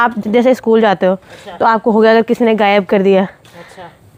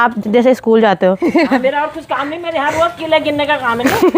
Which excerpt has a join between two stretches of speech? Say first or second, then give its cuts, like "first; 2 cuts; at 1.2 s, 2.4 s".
second; 1 cut; at 1.2 s